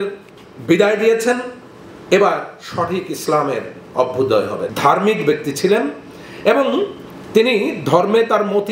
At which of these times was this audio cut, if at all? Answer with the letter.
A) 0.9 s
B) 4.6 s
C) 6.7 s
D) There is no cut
B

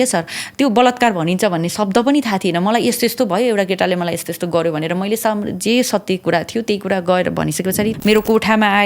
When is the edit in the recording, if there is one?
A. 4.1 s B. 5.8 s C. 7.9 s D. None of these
C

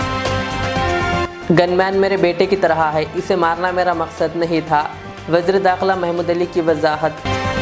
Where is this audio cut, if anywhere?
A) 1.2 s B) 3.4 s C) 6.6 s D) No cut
A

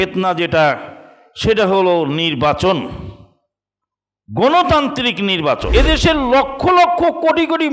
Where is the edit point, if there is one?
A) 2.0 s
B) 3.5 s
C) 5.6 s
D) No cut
C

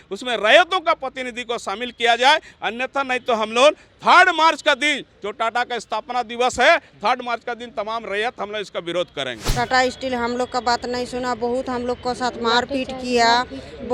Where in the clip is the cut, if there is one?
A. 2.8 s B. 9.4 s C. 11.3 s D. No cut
B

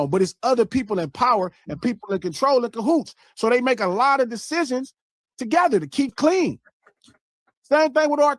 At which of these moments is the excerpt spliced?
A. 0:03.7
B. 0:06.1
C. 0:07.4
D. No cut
B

